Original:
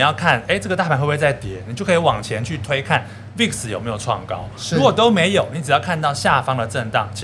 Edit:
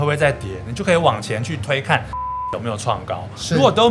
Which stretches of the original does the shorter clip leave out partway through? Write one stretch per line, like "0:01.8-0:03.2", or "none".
0:03.3-0:03.5